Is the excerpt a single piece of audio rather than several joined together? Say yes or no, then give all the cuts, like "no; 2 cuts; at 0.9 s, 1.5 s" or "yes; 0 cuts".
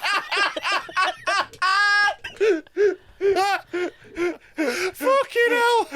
yes; 0 cuts